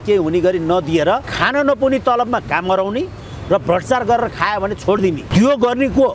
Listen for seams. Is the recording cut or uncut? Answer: cut